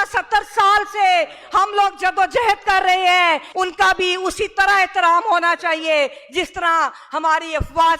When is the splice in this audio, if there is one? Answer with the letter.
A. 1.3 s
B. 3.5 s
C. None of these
B